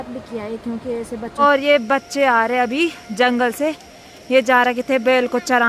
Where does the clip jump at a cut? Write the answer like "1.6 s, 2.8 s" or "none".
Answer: 1.3 s